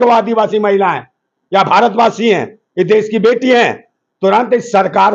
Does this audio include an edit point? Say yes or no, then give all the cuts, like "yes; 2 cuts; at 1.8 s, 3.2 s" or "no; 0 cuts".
no; 0 cuts